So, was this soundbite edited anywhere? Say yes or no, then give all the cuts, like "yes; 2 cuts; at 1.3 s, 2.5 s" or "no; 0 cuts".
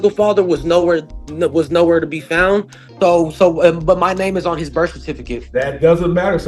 yes; 1 cut; at 2.8 s